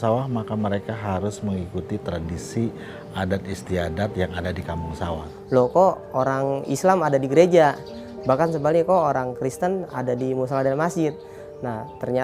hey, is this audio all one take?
no; 1 cut; at 5.2 s

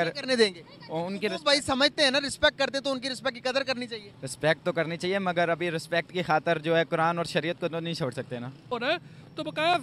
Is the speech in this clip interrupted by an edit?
yes; 1 cut; at 8.7 s

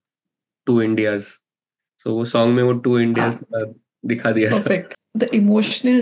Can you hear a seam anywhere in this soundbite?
yes; 1 cut; at 5.0 s

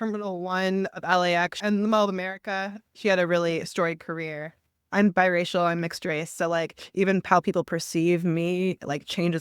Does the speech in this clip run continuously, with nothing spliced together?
no; 3 cuts; at 1.6 s, 2.9 s, 4.8 s

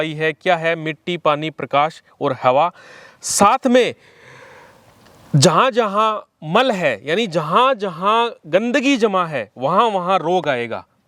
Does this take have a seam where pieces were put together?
no; 0 cuts

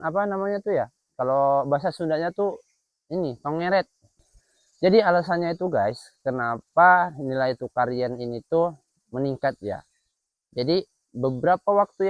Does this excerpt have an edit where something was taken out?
yes; 1 cut; at 4.2 s

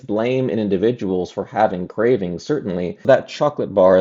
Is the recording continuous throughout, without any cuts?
no; 1 cut; at 3.0 s

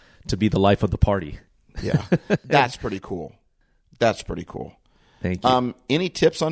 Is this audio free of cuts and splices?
no; 1 cut; at 2.4 s

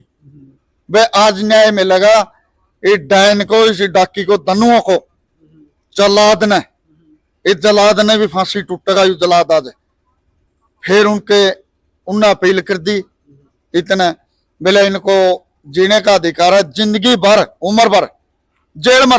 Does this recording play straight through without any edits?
yes; 0 cuts

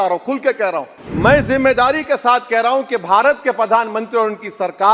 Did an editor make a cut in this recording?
yes; 1 cut; at 1.0 s

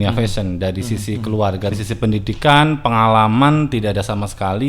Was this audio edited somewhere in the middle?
yes; 1 cut; at 1.8 s

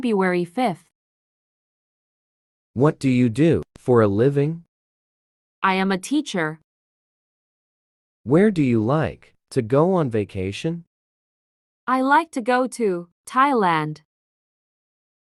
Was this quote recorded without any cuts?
yes; 0 cuts

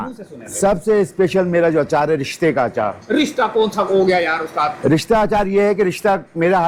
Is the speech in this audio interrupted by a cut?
no; 0 cuts

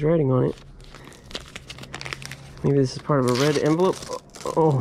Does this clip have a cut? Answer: yes; 1 cut; at 1.0 s

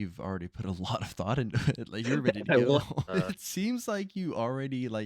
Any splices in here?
yes; 1 cut; at 3.1 s

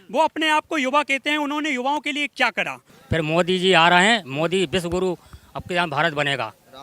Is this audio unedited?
no; 1 cut; at 2.9 s

